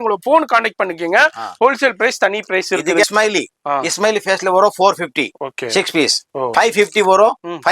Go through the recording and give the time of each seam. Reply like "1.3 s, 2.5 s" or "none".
3.0 s, 6.5 s